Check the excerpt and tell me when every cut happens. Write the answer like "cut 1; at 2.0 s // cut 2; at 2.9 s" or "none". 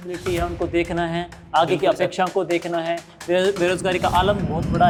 none